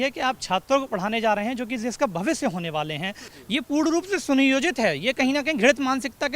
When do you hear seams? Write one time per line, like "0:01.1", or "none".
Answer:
0:03.3